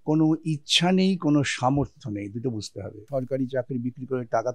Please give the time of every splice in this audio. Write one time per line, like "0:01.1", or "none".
0:03.1